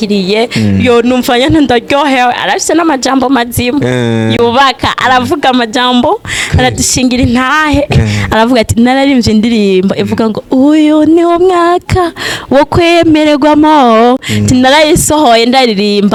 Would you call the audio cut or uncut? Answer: uncut